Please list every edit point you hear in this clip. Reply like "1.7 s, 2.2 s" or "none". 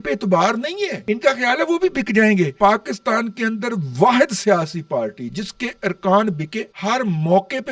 1.0 s, 2.5 s, 6.6 s